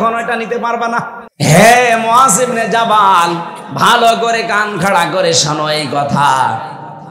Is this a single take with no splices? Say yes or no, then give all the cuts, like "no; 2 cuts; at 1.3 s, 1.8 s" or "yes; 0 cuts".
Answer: no; 1 cut; at 1.2 s